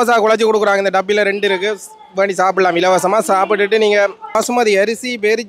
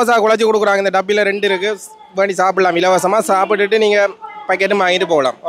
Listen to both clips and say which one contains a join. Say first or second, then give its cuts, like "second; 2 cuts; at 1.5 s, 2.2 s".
first; 1 cut; at 4.4 s